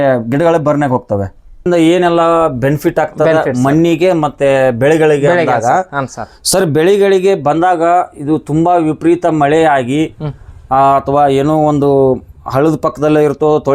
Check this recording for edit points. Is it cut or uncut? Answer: cut